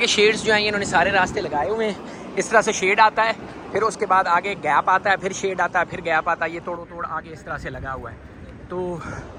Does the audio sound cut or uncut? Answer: uncut